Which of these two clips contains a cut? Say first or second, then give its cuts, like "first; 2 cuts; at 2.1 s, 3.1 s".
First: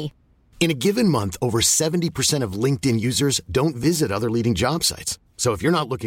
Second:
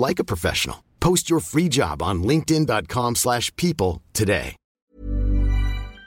second; 1 cut; at 4.8 s